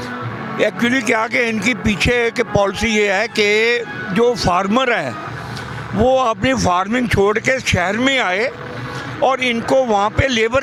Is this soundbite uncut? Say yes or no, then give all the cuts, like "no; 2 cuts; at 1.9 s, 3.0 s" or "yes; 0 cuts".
yes; 0 cuts